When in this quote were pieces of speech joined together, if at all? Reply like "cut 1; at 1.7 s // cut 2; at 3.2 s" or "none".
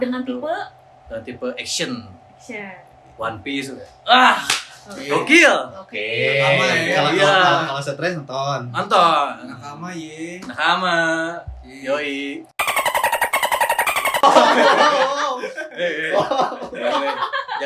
none

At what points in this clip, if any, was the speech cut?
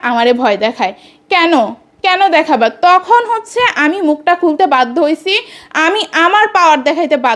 none

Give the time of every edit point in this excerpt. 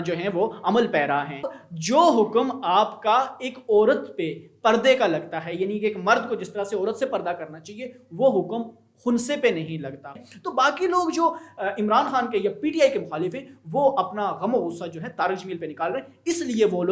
cut 1; at 1.5 s // cut 2; at 10.2 s

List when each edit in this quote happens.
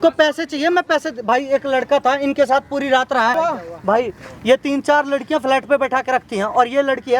cut 1; at 3.3 s

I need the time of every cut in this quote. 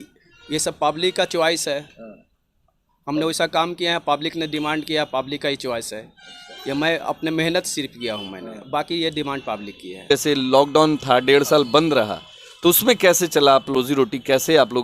cut 1; at 10.0 s // cut 2; at 13.8 s

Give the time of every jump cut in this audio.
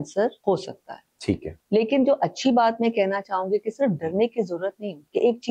none

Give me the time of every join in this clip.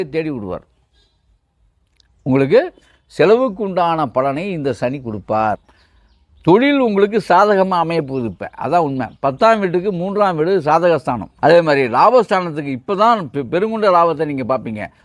cut 1; at 5.8 s // cut 2; at 11.3 s

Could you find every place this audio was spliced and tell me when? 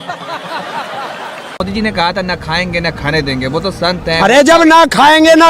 cut 1; at 1.5 s

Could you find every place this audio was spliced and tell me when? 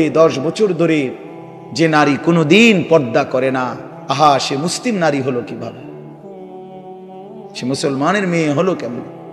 cut 1; at 5.8 s // cut 2; at 7.3 s

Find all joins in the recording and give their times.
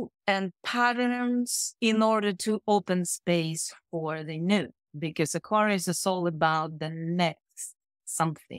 cut 1; at 1.6 s

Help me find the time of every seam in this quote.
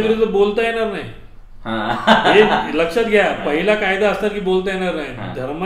none

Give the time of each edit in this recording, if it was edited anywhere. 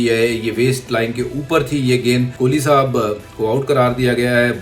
cut 1; at 2.3 s

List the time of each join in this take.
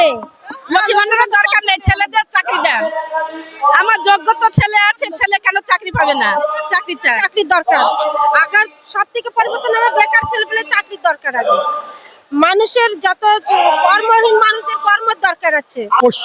none

